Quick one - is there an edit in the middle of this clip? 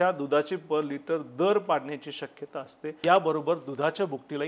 yes; 1 cut; at 2.8 s

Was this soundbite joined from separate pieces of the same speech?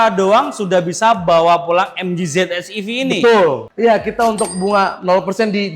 yes; 1 cut; at 3.7 s

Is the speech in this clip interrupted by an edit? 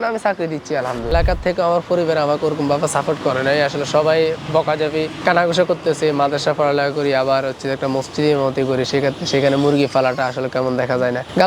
yes; 1 cut; at 1.1 s

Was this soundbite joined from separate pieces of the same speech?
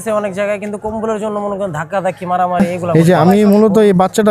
yes; 1 cut; at 2.8 s

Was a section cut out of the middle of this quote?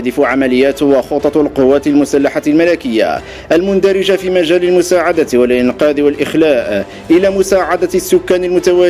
no; 0 cuts

